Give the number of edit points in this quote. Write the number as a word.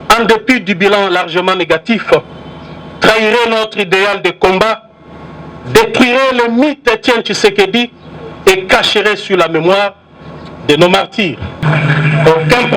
one